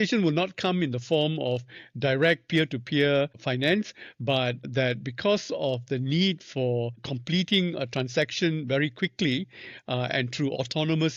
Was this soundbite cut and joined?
no; 0 cuts

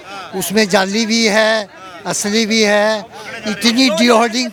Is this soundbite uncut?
yes; 0 cuts

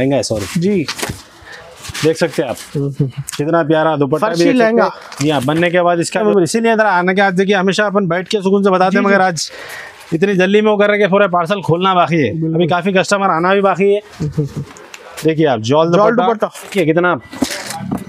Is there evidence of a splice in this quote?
yes; 2 cuts; at 6.2 s, 16.7 s

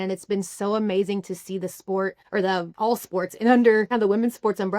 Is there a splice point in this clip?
yes; 2 cuts; at 2.4 s, 3.9 s

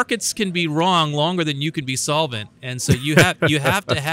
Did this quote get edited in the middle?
no; 0 cuts

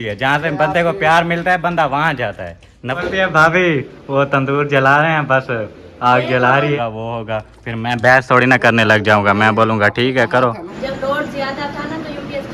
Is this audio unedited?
no; 3 cuts; at 3.0 s, 6.8 s, 10.7 s

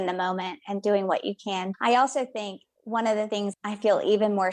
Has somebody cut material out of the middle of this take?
yes; 1 cut; at 3.5 s

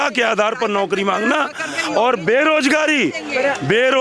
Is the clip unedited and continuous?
yes; 0 cuts

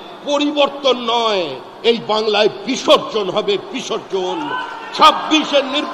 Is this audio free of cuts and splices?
yes; 0 cuts

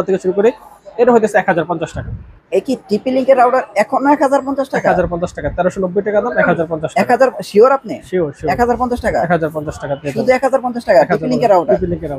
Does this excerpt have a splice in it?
no; 0 cuts

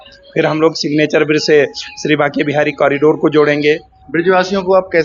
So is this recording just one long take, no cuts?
no; 1 cut; at 3.9 s

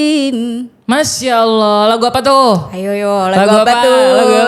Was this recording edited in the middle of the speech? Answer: no; 0 cuts

